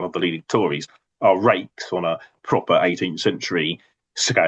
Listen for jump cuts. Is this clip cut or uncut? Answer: uncut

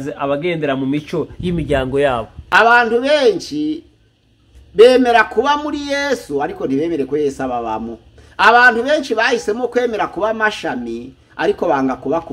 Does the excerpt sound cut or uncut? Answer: cut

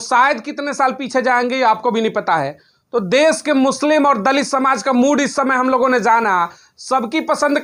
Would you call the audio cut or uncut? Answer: uncut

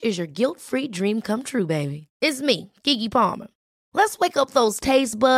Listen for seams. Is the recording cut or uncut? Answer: uncut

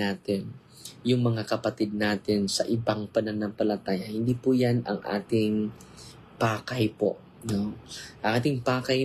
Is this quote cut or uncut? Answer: uncut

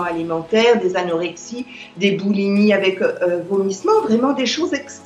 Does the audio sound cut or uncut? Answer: uncut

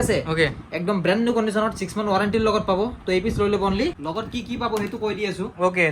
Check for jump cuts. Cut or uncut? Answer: cut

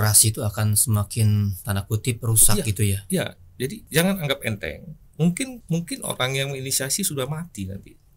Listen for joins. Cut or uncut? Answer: cut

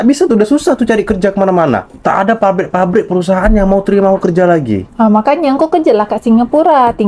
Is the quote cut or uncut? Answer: uncut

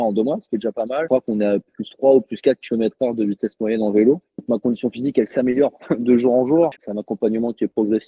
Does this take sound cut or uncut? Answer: cut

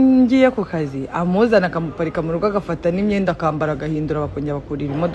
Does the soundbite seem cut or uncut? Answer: uncut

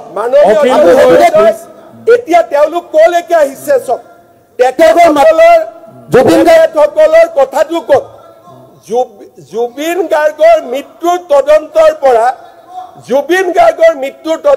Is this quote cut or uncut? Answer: uncut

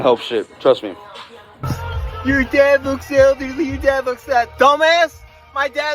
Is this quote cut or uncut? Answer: cut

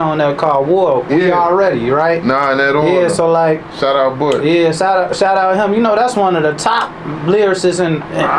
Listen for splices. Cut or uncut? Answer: uncut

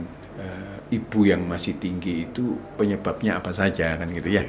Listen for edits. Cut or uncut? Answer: uncut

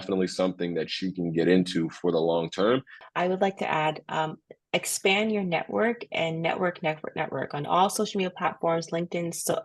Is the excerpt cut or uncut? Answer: cut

